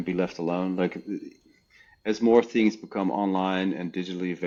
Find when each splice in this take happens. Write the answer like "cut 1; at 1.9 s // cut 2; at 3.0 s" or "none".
none